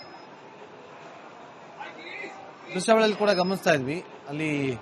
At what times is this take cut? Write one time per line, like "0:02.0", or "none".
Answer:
0:02.6